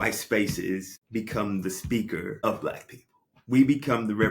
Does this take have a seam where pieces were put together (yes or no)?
yes